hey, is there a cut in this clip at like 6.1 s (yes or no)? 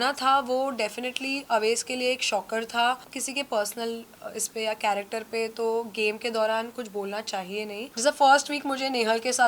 no